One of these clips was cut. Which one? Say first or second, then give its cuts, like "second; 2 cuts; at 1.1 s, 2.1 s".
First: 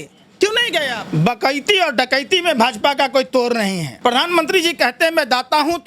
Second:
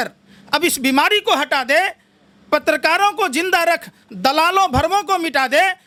first; 2 cuts; at 1.0 s, 3.9 s